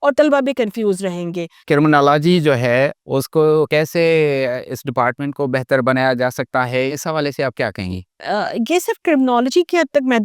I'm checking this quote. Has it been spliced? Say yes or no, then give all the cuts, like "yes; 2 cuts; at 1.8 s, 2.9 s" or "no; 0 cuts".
yes; 5 cuts; at 1.6 s, 3.0 s, 3.7 s, 6.9 s, 8.1 s